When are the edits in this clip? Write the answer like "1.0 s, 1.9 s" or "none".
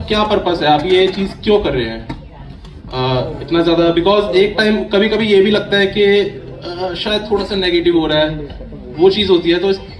none